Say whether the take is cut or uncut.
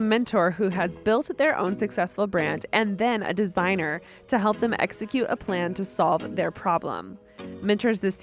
uncut